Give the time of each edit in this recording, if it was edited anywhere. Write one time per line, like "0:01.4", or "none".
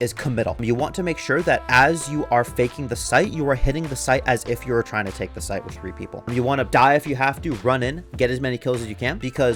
none